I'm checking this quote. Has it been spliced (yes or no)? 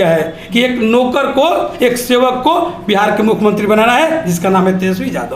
no